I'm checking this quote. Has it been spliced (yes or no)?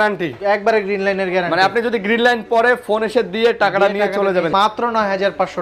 yes